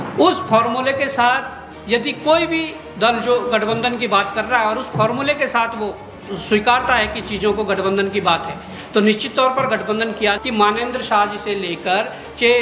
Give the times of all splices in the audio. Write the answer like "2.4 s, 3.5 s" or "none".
10.4 s